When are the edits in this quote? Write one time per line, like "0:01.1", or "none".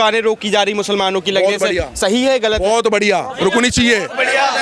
none